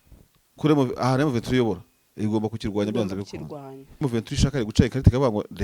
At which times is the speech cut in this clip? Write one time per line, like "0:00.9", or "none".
0:04.0